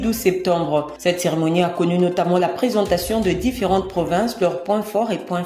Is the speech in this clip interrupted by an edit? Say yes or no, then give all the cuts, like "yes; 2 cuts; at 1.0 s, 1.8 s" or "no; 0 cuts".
no; 0 cuts